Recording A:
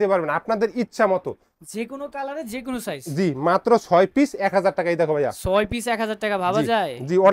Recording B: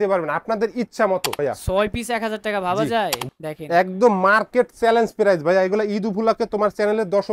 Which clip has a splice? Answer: B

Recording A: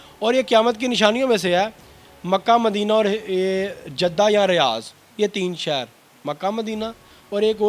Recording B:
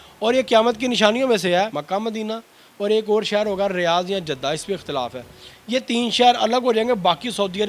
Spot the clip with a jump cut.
B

